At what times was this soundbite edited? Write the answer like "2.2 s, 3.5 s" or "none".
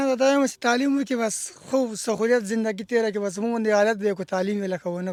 none